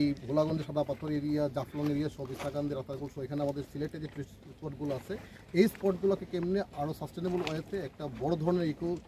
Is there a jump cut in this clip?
no; 0 cuts

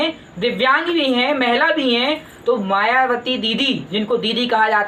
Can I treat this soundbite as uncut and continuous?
yes; 0 cuts

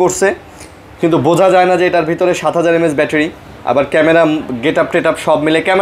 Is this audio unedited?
yes; 0 cuts

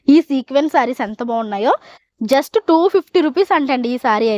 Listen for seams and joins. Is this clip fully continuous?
yes; 0 cuts

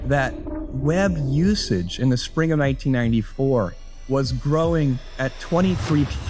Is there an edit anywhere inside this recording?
no; 0 cuts

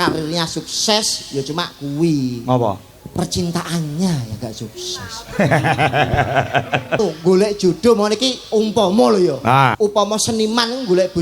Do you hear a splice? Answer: yes; 2 cuts; at 7.0 s, 9.7 s

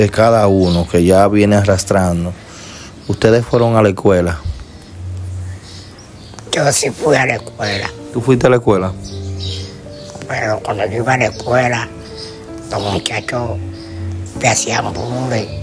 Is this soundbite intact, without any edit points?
yes; 0 cuts

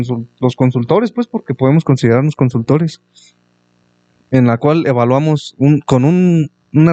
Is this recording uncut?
yes; 0 cuts

